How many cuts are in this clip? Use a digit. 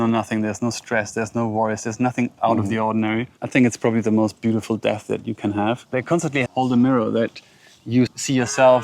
3